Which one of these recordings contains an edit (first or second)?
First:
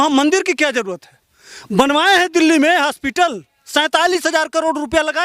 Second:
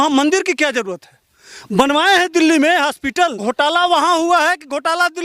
second